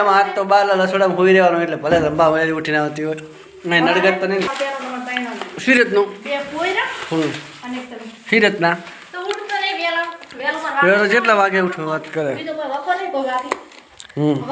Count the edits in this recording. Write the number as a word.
one